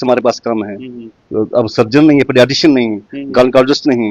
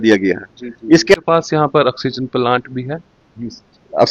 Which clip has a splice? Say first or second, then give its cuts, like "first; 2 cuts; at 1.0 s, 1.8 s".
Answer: second; 1 cut; at 1.1 s